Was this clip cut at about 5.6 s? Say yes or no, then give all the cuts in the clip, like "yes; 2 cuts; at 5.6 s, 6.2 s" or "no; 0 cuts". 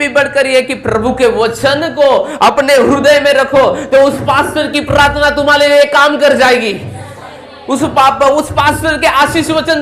no; 0 cuts